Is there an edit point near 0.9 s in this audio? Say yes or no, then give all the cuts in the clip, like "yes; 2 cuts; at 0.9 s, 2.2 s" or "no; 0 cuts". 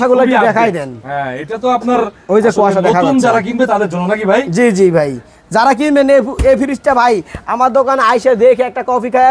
no; 0 cuts